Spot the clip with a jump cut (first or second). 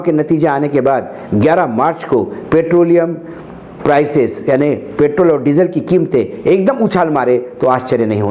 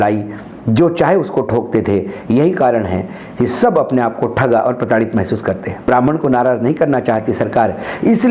second